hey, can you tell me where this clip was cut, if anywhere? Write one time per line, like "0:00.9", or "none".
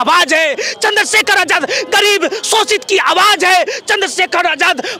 none